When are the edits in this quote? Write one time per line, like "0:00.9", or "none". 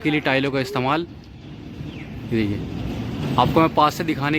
none